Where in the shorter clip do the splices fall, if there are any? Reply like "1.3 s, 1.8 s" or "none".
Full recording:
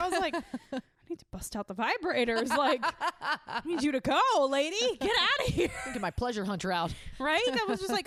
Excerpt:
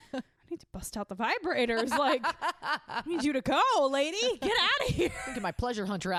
none